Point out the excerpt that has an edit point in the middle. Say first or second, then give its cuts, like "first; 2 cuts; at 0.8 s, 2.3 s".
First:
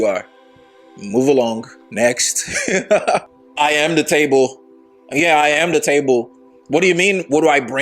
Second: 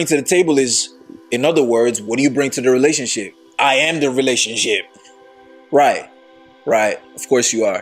first; 1 cut; at 3.3 s